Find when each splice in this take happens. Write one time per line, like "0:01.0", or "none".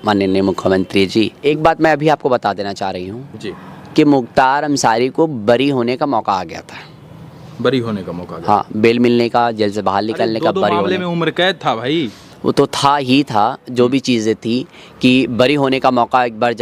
none